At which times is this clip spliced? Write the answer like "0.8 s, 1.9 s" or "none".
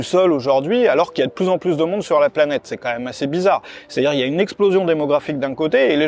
none